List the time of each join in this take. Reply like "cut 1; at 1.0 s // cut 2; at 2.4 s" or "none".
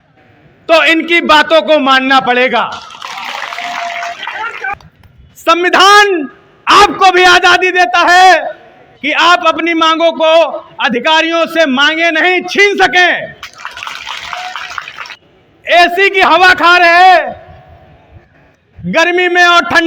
cut 1; at 4.7 s // cut 2; at 15.1 s